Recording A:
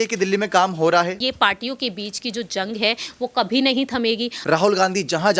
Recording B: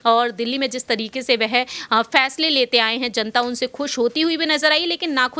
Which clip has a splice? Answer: A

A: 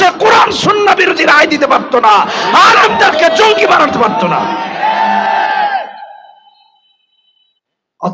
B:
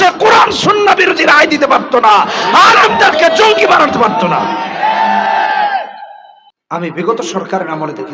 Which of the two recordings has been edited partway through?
B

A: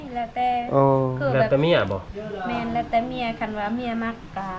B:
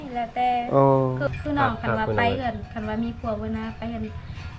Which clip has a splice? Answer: B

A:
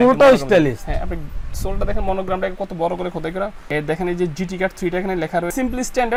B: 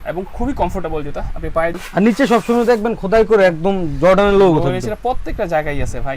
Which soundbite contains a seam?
B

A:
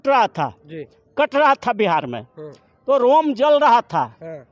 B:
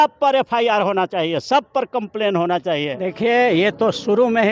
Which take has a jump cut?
B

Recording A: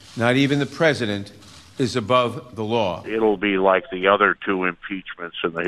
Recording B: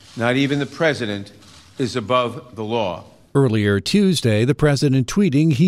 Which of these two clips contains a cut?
A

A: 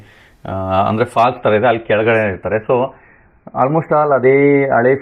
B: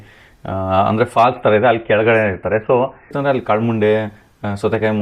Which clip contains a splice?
B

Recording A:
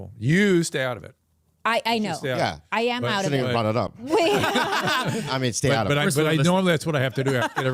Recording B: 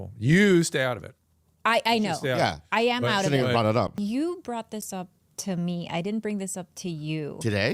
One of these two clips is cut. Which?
B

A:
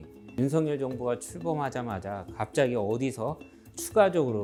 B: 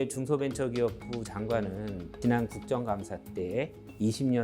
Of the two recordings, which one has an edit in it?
B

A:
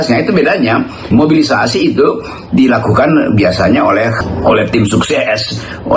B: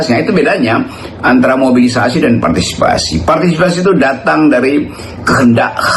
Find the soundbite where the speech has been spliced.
A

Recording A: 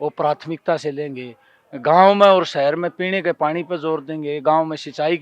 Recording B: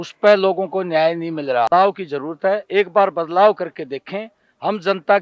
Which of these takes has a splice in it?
B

